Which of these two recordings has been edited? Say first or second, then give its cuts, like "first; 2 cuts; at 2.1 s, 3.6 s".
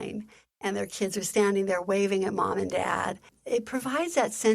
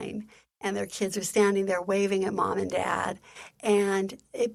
first; 1 cut; at 3.3 s